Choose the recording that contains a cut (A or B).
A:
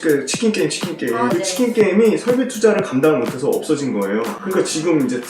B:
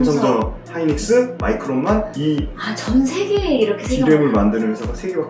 A